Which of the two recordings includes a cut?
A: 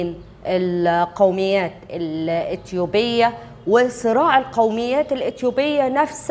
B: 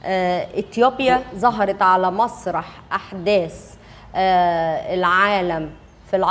B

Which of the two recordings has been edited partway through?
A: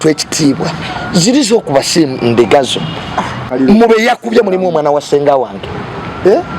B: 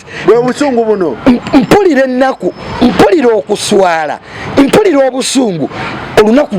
A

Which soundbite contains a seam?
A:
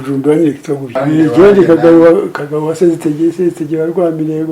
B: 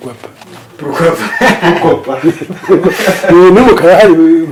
A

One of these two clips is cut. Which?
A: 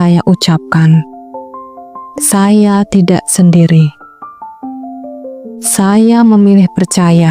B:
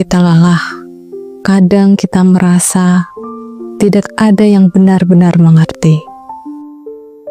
A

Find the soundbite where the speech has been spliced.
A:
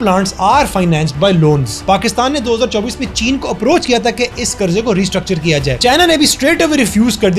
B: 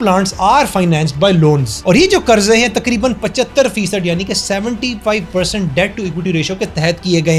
A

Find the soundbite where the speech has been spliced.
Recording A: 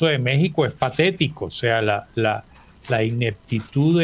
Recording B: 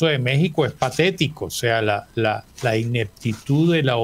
B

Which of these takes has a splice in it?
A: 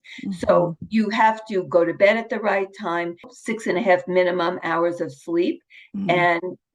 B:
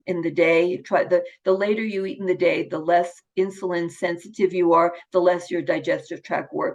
A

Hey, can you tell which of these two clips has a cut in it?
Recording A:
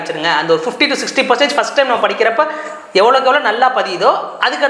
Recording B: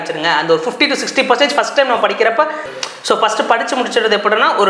B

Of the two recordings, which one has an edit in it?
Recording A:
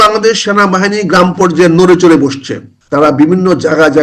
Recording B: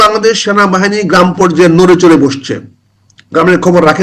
A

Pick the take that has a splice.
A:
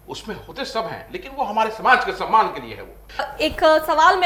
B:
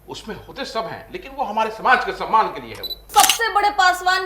B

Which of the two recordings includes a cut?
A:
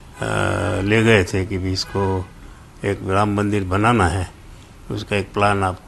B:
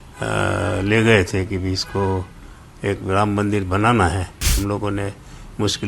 B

